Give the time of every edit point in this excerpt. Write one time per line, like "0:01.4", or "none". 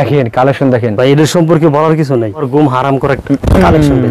0:02.4